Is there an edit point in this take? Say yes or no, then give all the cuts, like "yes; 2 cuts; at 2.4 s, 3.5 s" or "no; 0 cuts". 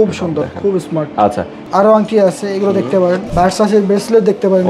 yes; 2 cuts; at 1.5 s, 3.3 s